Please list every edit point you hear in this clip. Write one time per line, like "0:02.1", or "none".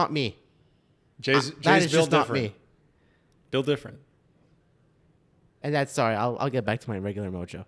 none